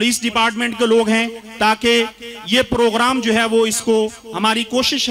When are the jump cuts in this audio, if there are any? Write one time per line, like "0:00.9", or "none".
none